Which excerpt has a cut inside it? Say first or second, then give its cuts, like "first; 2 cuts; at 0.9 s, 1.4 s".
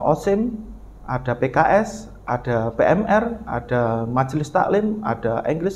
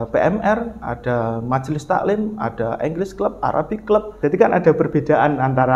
second; 1 cut; at 4.1 s